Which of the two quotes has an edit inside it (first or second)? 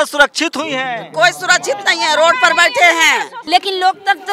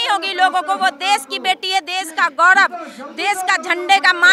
first